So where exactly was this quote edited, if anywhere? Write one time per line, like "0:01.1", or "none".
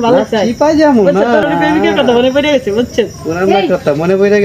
0:01.4